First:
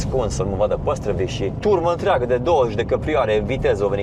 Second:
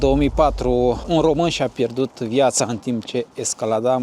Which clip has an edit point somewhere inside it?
second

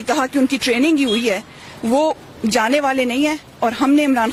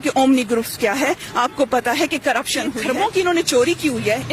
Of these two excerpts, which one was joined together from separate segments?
second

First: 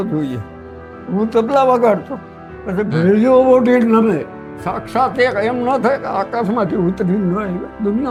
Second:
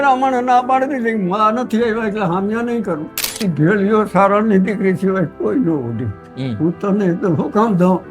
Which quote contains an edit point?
second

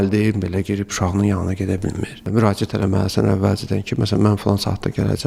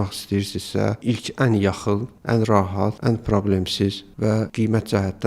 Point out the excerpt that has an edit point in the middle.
second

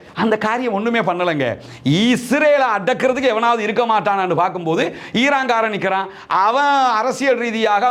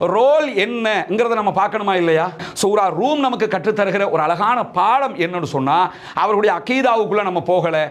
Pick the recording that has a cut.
second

